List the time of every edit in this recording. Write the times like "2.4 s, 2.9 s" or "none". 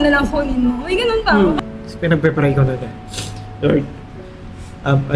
1.6 s